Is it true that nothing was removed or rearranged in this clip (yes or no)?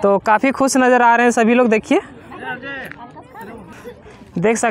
yes